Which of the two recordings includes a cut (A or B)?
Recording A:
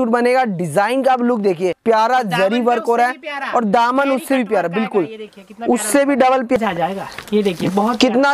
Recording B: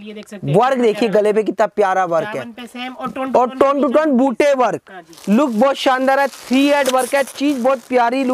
A